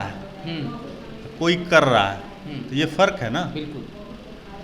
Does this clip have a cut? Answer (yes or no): no